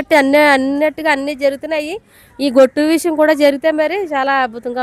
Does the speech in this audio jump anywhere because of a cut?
no; 0 cuts

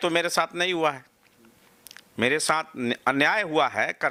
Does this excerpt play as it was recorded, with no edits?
yes; 0 cuts

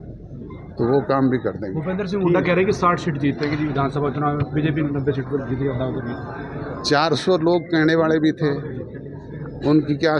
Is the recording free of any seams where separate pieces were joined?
yes; 0 cuts

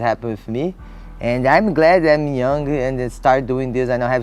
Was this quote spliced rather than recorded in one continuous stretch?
no; 0 cuts

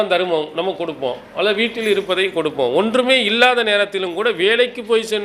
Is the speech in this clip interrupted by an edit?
no; 0 cuts

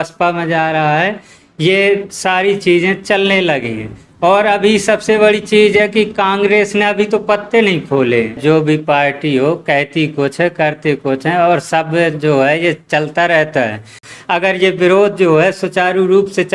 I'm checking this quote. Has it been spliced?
yes; 2 cuts; at 8.4 s, 14.0 s

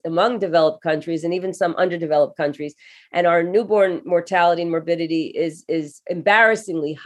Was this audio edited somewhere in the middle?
yes; 1 cut; at 6.0 s

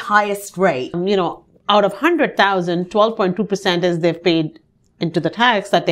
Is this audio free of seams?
no; 1 cut; at 0.9 s

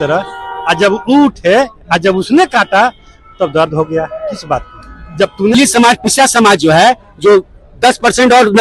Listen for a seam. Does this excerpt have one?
yes; 1 cut; at 5.5 s

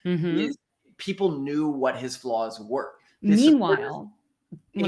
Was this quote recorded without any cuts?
yes; 0 cuts

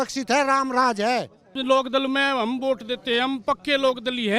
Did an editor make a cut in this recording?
yes; 1 cut; at 1.5 s

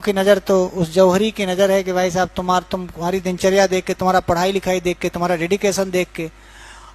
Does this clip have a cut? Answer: no; 0 cuts

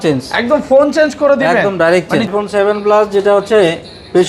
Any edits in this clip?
yes; 1 cut; at 2.3 s

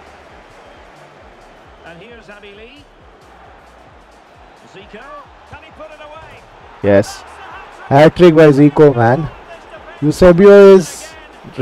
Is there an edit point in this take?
no; 0 cuts

